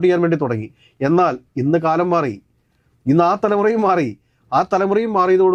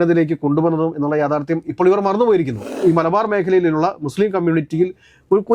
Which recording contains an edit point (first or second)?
second